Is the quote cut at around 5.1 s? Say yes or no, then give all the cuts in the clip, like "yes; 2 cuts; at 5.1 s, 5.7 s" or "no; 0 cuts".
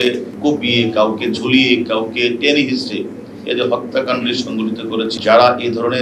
yes; 1 cut; at 5.1 s